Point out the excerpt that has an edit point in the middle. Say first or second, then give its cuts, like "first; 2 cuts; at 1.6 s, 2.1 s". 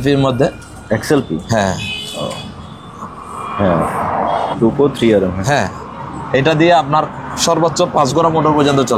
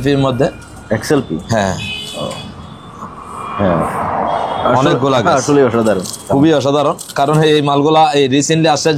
first; 1 cut; at 4.5 s